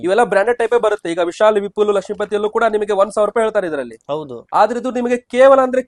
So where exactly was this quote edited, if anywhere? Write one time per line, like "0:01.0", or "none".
none